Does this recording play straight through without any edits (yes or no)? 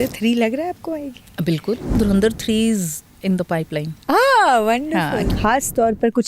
no